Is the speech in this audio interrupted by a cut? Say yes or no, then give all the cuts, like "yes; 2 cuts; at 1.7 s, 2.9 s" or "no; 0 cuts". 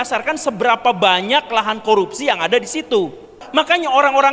yes; 1 cut; at 3.4 s